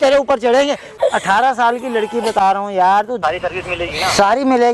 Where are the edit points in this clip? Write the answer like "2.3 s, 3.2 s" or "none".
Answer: 0.9 s, 3.2 s